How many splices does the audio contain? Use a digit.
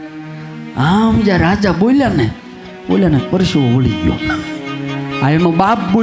0